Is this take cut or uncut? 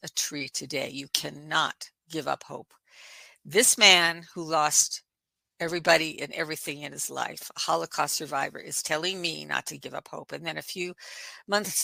uncut